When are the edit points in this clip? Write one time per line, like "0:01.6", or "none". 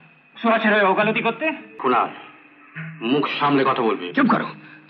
0:01.7